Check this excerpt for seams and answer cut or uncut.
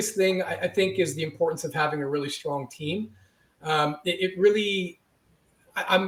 uncut